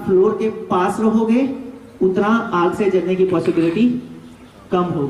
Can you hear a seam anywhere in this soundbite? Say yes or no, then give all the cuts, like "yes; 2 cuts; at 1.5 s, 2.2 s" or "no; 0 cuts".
no; 0 cuts